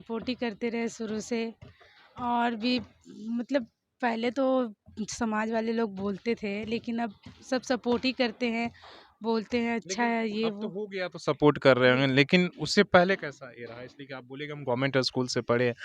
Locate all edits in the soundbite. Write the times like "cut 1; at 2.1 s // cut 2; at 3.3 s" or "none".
none